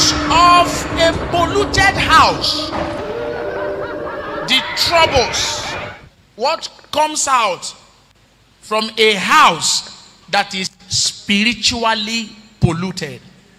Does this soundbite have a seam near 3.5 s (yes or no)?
no